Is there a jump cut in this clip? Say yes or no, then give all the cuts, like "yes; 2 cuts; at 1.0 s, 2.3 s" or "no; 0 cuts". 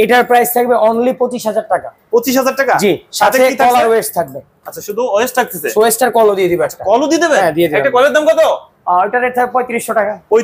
no; 0 cuts